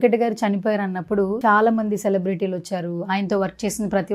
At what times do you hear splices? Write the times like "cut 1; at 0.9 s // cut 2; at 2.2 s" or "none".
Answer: cut 1; at 1.4 s